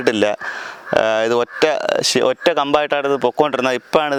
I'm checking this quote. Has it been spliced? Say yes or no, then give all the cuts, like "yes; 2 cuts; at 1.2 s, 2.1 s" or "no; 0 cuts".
no; 0 cuts